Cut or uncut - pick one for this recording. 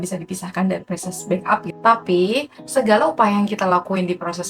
cut